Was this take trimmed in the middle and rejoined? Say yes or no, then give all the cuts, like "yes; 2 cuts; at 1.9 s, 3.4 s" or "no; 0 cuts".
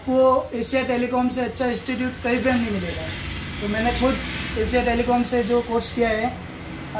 no; 0 cuts